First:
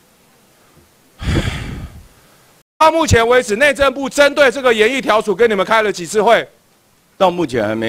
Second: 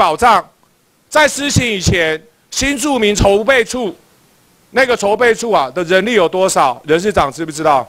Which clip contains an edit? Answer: first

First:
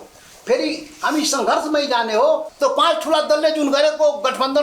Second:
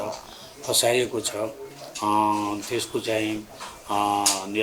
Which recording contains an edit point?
first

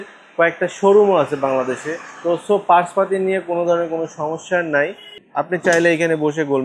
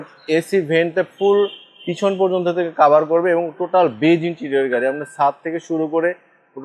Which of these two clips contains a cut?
first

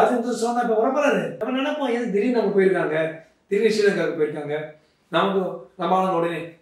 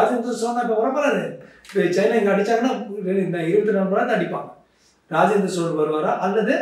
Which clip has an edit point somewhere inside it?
first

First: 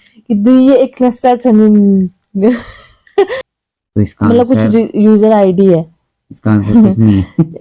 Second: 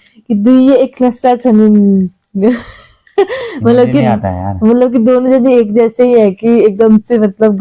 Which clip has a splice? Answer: first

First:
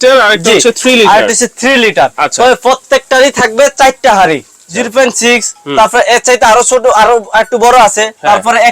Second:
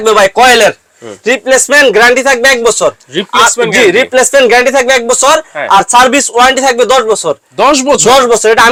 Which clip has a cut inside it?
first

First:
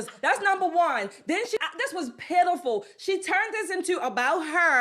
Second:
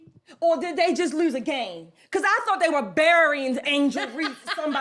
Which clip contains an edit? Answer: first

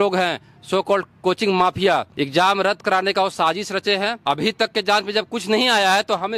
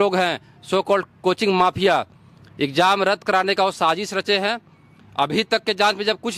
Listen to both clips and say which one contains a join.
first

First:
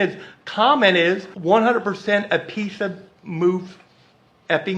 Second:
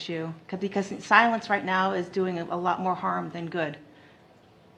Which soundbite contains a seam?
first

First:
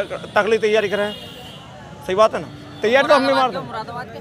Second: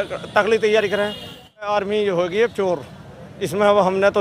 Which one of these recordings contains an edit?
second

